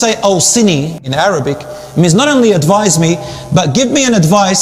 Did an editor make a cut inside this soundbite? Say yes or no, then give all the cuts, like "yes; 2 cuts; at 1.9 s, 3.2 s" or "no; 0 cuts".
yes; 1 cut; at 1.0 s